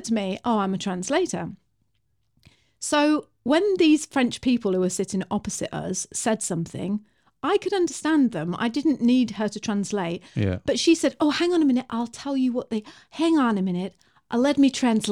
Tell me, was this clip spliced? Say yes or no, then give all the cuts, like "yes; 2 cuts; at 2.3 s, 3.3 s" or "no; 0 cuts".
no; 0 cuts